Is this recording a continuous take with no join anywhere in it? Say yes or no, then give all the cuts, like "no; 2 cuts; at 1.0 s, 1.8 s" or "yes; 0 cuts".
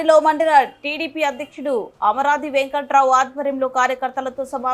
yes; 0 cuts